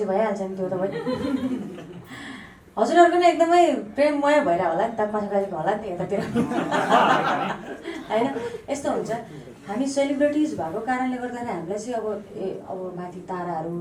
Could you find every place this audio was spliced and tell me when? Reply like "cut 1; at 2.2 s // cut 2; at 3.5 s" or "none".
none